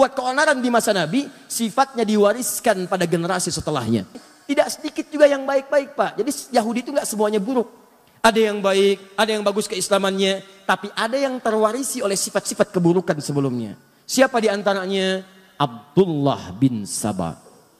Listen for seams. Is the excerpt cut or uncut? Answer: cut